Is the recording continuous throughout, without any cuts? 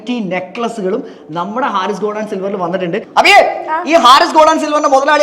no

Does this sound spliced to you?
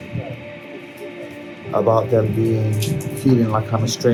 no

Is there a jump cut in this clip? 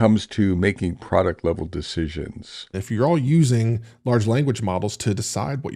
yes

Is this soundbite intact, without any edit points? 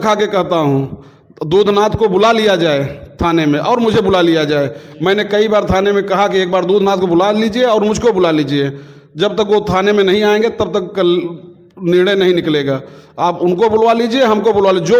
yes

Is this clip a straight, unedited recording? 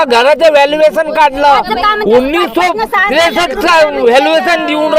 yes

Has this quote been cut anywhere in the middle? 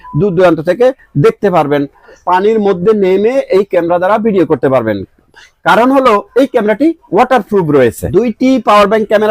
yes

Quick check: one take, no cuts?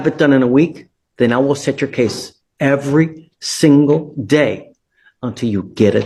yes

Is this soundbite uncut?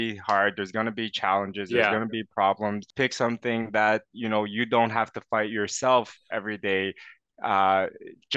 no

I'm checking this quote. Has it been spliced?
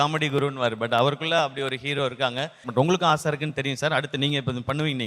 yes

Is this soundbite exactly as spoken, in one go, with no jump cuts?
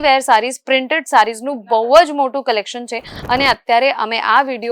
yes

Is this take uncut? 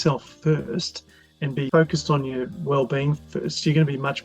no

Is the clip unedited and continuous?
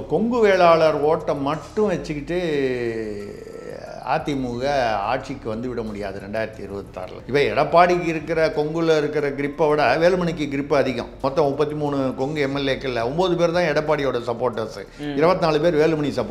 no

